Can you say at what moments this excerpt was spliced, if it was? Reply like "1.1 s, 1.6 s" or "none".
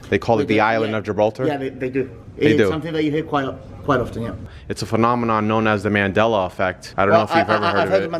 4.4 s, 6.8 s